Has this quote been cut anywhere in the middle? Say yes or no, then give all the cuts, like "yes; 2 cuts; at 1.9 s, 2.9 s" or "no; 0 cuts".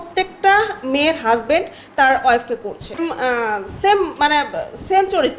no; 0 cuts